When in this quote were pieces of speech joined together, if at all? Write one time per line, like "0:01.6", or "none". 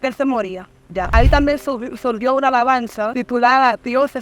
0:01.1
0:03.1